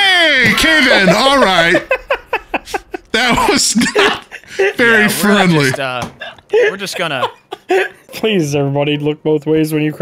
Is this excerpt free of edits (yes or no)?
no